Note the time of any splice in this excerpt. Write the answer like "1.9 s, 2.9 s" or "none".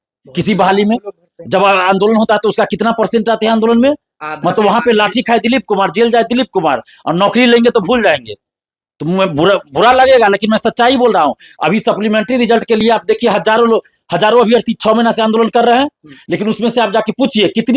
none